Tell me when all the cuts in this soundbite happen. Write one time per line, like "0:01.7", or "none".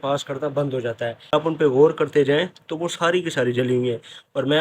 0:01.3